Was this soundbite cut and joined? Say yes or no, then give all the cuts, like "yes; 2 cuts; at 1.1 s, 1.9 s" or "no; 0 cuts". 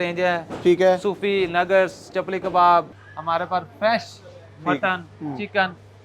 yes; 1 cut; at 3.0 s